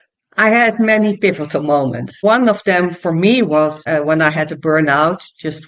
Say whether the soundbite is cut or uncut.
cut